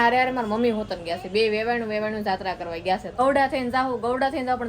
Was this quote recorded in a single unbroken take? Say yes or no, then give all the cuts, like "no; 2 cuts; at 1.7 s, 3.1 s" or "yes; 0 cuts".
no; 1 cut; at 3.2 s